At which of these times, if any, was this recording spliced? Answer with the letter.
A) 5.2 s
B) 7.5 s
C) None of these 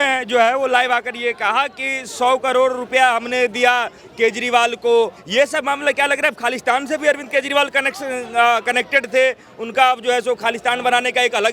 A